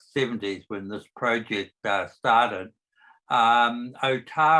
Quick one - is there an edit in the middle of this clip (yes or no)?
no